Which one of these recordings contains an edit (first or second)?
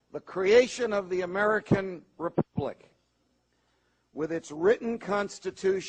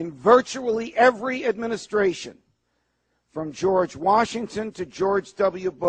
second